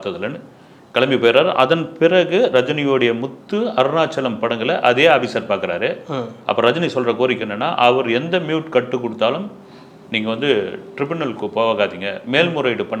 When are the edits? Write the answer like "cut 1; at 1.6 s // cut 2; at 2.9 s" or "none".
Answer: none